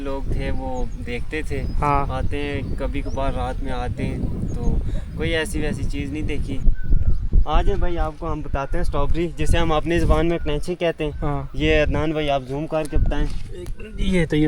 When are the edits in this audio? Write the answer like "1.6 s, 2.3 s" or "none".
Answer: 6.7 s